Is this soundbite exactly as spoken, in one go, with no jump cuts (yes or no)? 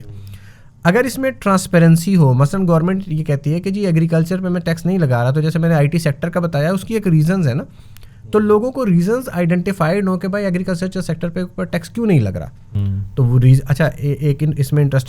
yes